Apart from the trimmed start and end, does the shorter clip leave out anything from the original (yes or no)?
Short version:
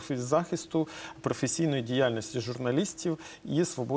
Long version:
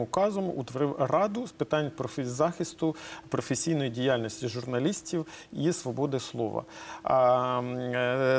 no